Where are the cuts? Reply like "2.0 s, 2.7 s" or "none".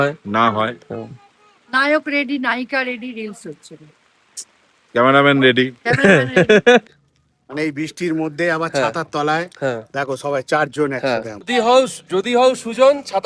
6.8 s, 11.5 s